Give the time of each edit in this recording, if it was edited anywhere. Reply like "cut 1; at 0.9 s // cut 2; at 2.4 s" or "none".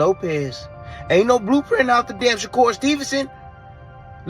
cut 1; at 2.2 s